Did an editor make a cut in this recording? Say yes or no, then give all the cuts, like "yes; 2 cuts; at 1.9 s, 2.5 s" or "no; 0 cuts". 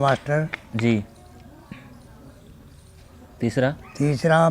no; 0 cuts